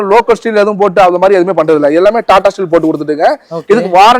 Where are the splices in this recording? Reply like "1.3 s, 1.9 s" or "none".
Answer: none